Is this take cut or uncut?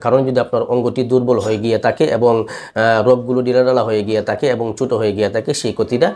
uncut